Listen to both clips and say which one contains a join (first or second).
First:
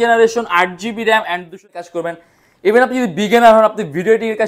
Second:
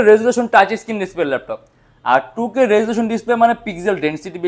first